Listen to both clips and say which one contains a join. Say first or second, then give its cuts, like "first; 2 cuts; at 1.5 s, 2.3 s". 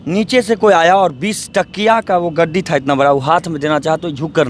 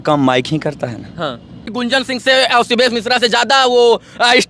second; 1 cut; at 1.6 s